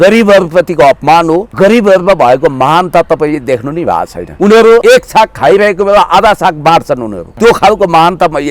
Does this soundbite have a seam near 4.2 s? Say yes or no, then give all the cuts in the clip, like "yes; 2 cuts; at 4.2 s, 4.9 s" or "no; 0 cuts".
yes; 4 cuts; at 1.5 s, 4.2 s, 4.8 s, 7.2 s